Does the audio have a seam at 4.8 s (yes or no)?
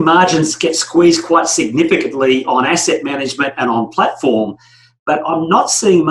no